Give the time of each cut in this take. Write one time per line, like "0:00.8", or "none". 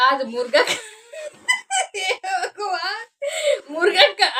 none